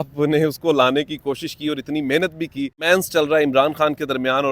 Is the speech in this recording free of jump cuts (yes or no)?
no